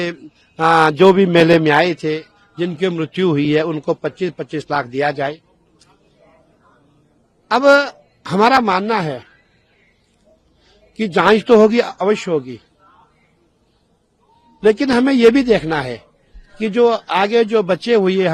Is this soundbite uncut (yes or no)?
yes